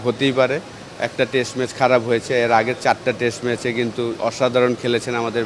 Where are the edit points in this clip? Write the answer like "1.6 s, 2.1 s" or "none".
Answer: none